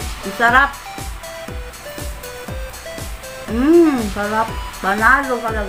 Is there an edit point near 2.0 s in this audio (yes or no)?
no